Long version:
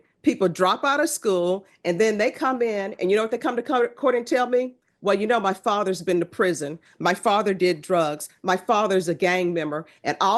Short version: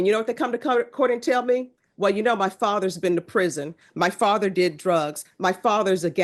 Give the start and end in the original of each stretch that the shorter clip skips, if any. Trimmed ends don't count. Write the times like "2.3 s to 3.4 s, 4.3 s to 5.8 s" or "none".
none